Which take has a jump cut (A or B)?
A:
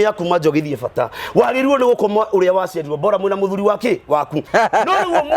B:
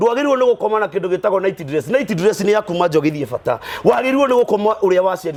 A